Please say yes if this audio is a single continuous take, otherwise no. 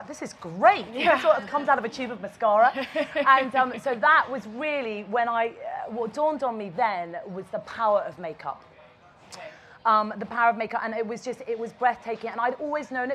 yes